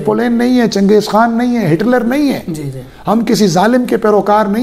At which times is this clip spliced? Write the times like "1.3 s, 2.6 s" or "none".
none